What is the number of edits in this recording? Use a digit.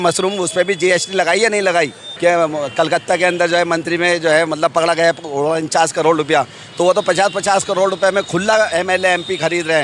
1